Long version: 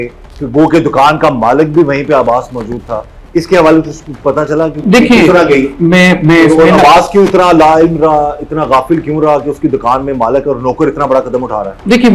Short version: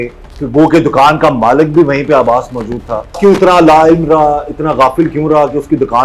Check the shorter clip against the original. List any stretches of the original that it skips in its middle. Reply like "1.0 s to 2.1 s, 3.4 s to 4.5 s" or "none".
3.2 s to 7.1 s